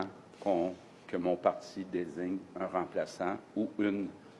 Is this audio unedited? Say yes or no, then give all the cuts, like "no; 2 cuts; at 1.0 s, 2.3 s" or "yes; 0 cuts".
yes; 0 cuts